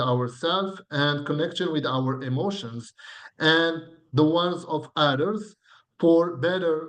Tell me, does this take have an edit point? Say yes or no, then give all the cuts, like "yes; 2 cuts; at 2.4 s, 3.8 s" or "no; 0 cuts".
no; 0 cuts